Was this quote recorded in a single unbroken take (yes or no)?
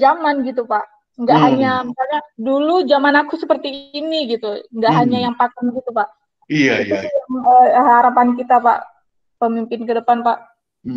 yes